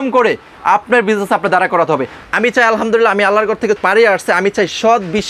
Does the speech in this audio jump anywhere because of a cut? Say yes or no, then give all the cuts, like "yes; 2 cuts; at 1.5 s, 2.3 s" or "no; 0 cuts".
yes; 2 cuts; at 2.1 s, 3.8 s